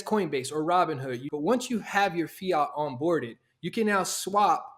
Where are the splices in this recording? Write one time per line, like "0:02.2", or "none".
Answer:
0:01.2